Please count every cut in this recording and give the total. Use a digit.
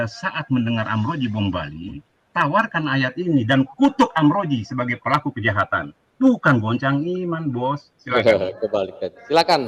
0